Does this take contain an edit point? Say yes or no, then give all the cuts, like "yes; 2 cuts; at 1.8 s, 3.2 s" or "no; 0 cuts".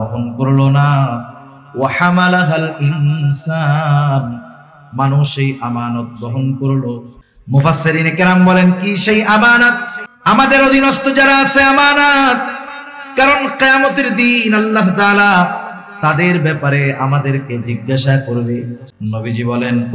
yes; 1 cut; at 18.8 s